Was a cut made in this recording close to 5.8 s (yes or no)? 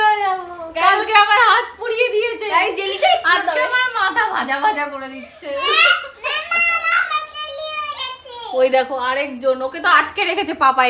no